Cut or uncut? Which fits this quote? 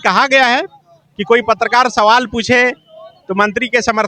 uncut